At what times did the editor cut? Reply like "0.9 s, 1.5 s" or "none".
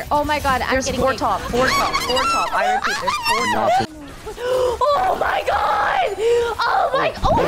3.9 s